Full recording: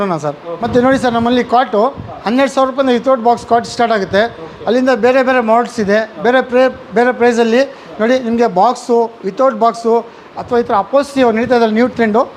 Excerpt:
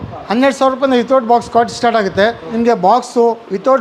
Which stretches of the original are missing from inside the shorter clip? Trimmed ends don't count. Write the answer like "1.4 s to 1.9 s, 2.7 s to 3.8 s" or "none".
4.5 s to 8.2 s